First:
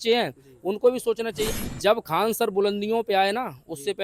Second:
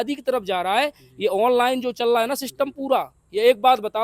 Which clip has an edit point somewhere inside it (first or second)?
first